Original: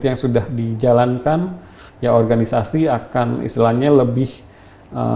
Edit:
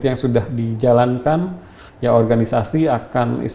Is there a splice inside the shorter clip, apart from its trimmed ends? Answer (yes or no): no